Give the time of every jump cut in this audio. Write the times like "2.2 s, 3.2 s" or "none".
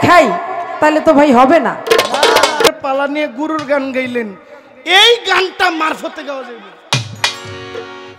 2.7 s